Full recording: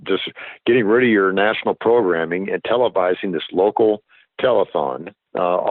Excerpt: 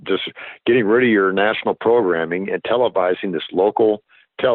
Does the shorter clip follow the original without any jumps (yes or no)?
yes